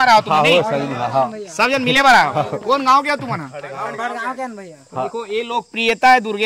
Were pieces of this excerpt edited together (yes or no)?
no